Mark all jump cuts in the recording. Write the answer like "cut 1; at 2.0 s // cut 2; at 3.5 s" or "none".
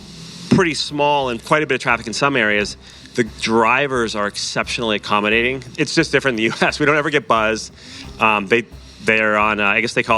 cut 1; at 1.4 s // cut 2; at 5.6 s